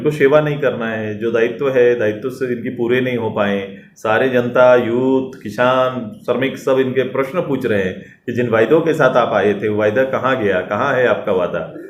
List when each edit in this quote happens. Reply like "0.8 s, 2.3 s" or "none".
none

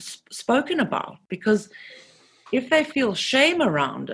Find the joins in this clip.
1.3 s

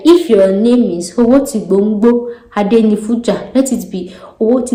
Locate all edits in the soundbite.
none

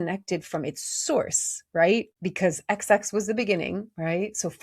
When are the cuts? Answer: 2.2 s

